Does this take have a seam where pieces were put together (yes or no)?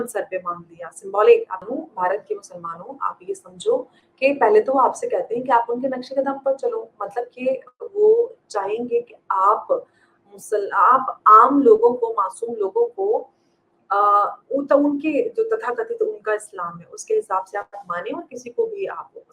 yes